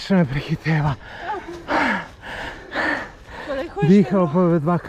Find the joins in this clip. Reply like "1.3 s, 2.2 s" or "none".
none